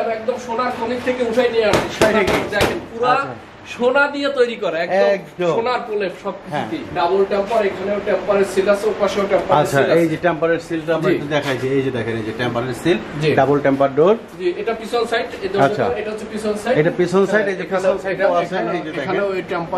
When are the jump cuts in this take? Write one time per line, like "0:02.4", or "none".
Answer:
0:06.9